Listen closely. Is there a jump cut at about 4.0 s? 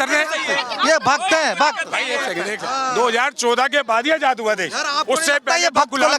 no; 1 cut; at 2.6 s

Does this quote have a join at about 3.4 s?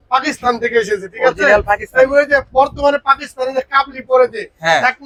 no; 0 cuts

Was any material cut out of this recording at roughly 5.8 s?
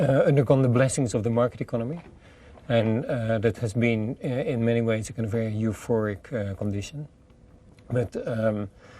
yes; 1 cut; at 5.8 s

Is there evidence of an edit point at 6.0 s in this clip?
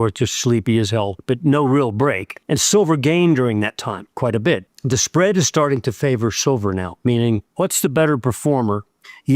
no; 5 cuts; at 1.2 s, 2.3 s, 4.1 s, 4.7 s, 7.5 s

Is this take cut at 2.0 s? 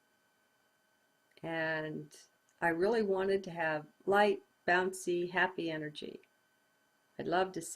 yes; 1 cut; at 2.0 s

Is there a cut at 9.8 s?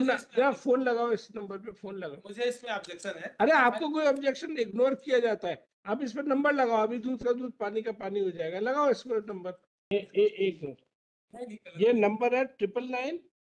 yes; 1 cut; at 9.8 s

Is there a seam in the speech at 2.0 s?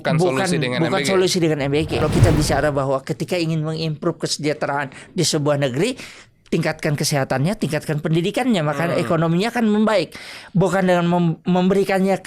yes; 1 cut; at 2.0 s

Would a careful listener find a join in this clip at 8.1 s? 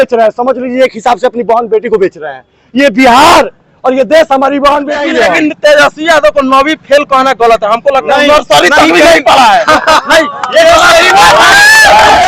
no; 1 cut; at 5.0 s

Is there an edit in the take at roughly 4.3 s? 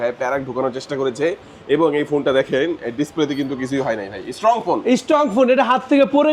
no; 0 cuts

